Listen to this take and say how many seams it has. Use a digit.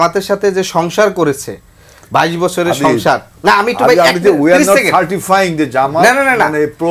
0